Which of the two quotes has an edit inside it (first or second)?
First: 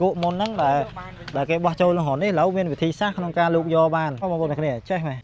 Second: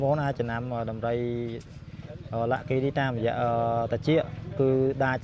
first